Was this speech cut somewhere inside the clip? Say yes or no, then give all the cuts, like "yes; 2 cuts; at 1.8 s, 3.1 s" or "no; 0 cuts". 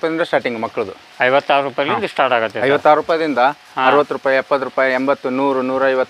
no; 0 cuts